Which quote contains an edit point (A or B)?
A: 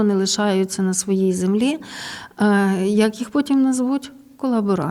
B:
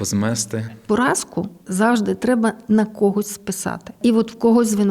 B